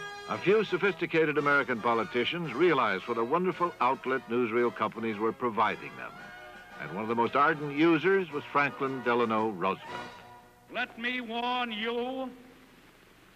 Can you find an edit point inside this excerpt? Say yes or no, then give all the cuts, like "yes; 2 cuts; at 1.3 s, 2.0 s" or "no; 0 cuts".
yes; 1 cut; at 7.4 s